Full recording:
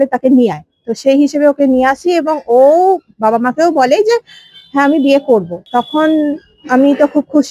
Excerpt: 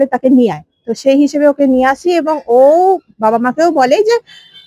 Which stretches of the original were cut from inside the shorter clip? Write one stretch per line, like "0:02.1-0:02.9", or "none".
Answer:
none